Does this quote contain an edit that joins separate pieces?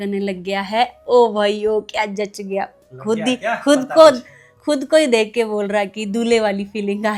no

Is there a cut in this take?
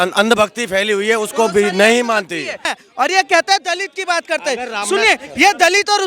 yes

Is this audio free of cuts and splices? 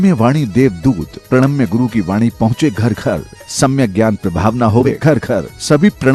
no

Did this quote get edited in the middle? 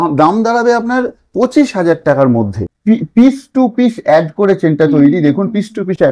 yes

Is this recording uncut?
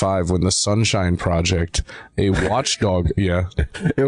yes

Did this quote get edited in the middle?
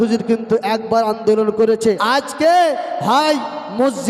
yes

